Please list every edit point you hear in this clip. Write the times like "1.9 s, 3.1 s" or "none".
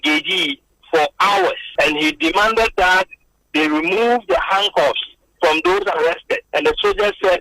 1.6 s, 6.4 s